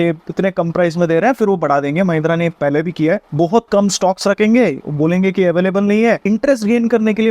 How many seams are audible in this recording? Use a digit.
2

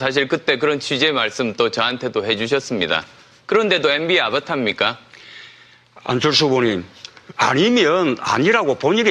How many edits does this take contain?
1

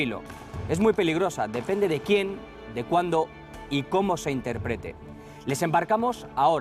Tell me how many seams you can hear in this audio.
1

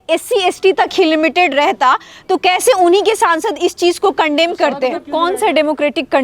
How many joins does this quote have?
1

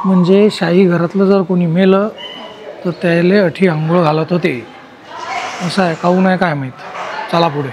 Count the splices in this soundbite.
0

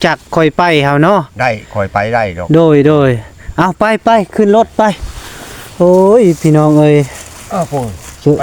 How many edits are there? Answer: 0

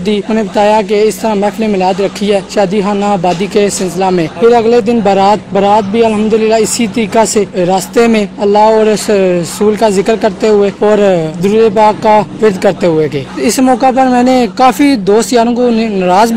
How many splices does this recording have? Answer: 5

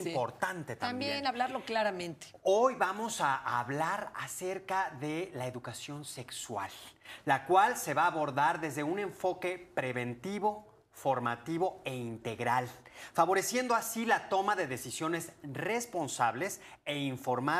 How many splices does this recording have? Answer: 1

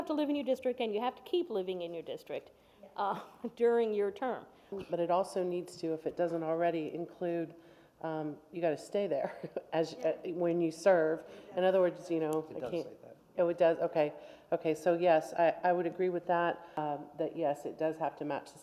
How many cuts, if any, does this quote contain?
2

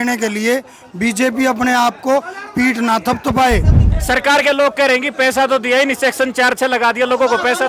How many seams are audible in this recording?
1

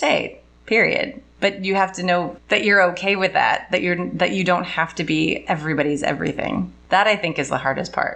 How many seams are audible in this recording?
3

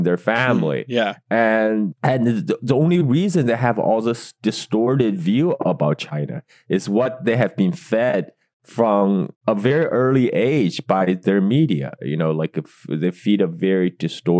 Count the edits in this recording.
0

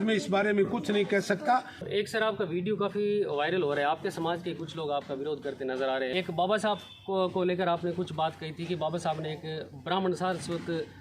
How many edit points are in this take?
2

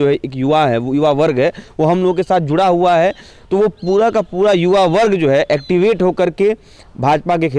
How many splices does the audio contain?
0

